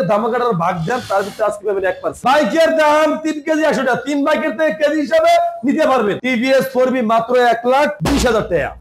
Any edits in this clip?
yes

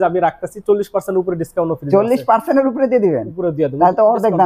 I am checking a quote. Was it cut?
no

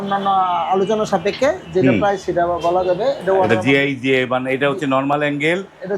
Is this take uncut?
yes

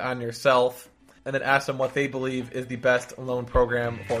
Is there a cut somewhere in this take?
no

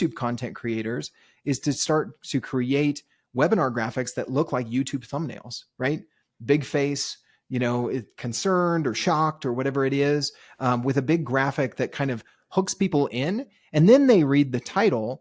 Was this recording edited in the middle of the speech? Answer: no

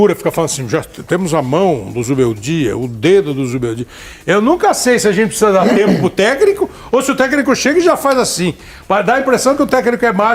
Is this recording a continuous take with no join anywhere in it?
yes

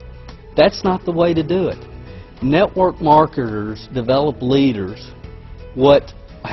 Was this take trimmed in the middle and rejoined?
yes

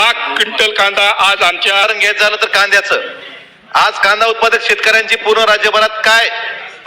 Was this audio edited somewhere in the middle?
yes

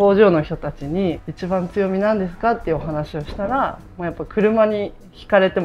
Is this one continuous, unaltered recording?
no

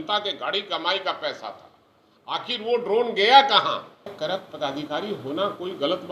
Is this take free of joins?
no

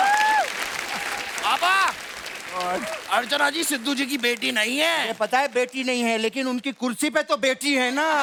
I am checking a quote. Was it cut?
no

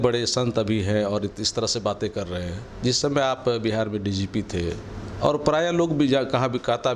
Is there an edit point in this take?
no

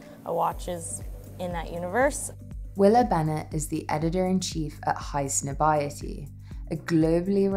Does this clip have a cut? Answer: no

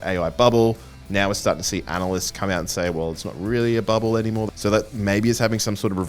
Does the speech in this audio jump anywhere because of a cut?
yes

